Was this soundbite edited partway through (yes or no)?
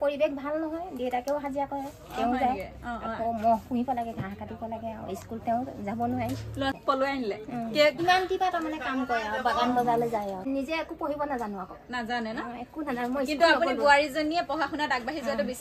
yes